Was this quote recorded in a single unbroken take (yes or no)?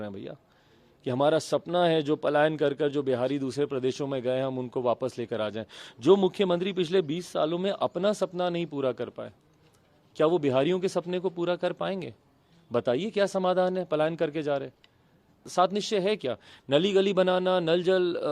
no